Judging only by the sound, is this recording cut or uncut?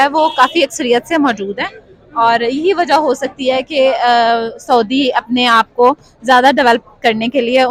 uncut